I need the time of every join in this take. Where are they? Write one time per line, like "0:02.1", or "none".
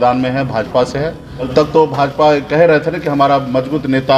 0:01.5